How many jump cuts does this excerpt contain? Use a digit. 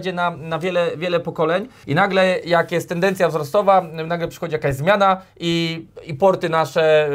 1